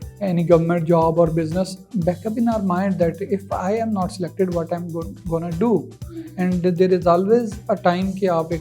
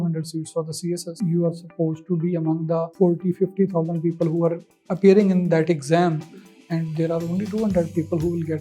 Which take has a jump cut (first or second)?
second